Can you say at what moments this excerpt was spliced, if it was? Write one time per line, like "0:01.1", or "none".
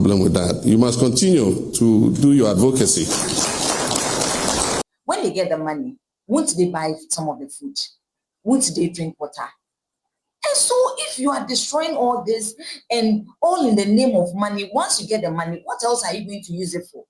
0:04.8